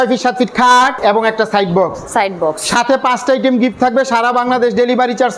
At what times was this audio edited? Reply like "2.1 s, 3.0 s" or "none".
1.0 s